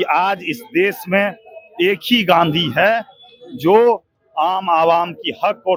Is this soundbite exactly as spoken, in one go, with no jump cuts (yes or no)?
yes